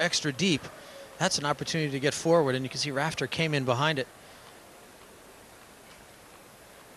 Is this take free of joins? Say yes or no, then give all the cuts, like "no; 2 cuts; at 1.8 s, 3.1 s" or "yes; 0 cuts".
no; 1 cut; at 3.6 s